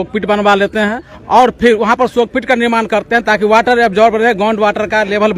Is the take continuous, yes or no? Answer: no